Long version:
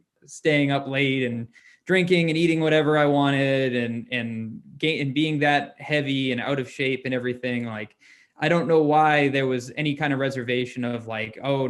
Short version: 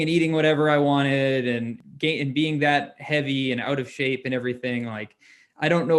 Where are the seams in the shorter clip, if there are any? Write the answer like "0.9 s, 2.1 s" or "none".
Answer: 1.8 s